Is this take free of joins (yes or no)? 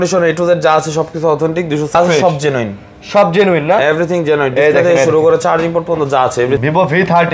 no